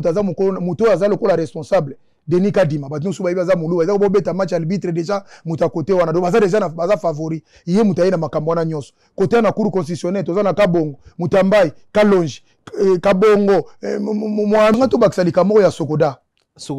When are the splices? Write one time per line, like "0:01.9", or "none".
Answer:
0:14.8